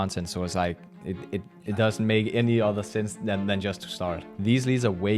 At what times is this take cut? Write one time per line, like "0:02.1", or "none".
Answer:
0:04.2